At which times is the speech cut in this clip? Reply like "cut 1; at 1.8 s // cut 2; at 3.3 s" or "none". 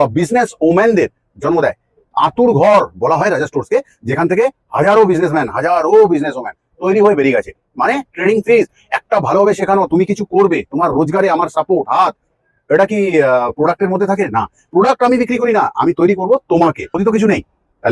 cut 1; at 16.9 s